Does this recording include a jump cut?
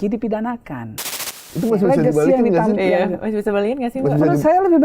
yes; 1 cut; at 1.4 s

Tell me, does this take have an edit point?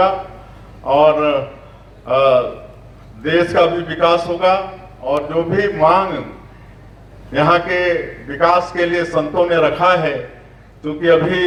no; 0 cuts

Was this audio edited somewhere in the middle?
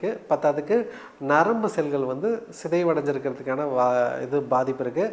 no; 0 cuts

